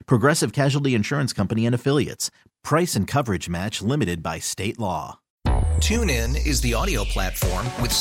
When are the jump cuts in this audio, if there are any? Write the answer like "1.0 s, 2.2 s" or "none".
5.2 s